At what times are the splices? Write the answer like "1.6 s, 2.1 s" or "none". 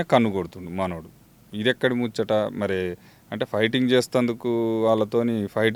none